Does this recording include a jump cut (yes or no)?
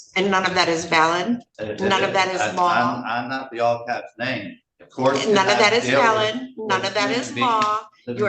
yes